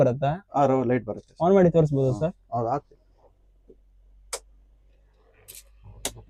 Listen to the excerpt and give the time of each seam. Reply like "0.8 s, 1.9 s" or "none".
none